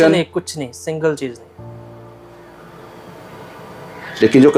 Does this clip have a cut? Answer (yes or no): no